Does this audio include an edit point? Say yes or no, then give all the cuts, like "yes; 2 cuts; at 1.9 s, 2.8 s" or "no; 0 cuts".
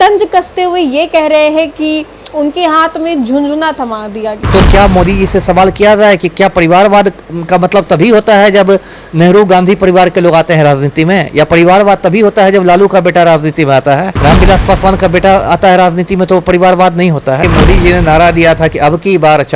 yes; 2 cuts; at 4.3 s, 17.5 s